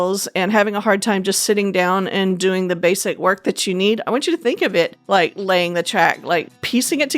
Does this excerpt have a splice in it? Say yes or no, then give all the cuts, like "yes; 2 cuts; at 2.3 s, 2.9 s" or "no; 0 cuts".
yes; 1 cut; at 5.0 s